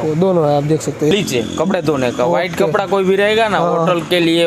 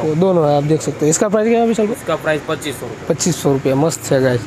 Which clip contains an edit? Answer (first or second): first